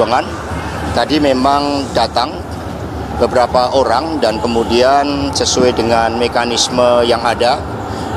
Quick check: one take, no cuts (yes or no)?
yes